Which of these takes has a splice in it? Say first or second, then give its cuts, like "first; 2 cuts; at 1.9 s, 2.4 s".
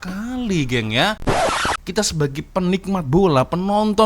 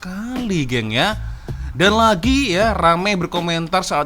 first; 1 cut; at 1.6 s